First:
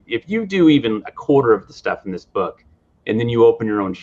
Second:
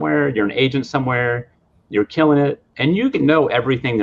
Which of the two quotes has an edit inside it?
second; 1 cut; at 2.7 s

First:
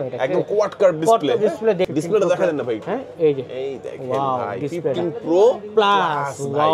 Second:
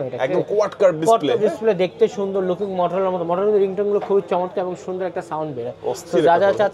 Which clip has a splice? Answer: first; 1 cut; at 1.9 s

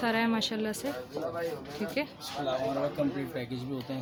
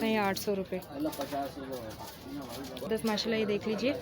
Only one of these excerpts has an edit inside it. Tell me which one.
second; 1 cut; at 2.9 s

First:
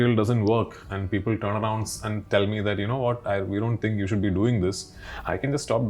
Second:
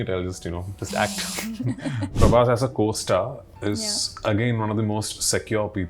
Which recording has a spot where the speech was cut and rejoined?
second; 1 cut; at 2.1 s

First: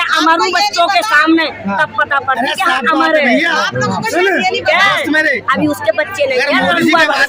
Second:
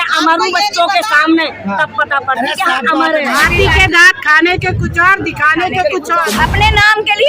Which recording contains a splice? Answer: second; 2 cuts; at 3.3 s, 6.2 s

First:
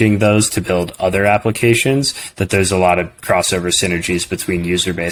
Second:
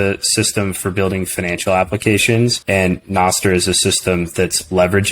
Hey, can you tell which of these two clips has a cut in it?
second; 1 cut; at 2.6 s

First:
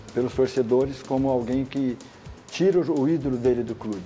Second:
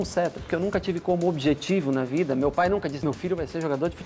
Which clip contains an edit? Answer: second; 1 cut; at 3.0 s

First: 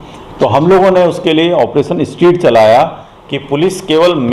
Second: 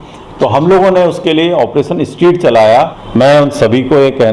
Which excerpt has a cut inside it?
second; 1 cut; at 3.0 s

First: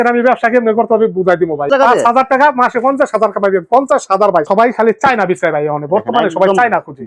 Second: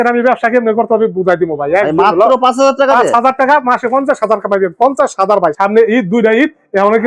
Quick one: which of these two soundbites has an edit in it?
first; 2 cuts; at 1.7 s, 4.5 s

